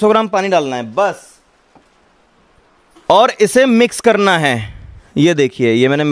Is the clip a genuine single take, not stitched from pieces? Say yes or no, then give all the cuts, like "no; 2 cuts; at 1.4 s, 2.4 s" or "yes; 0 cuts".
yes; 0 cuts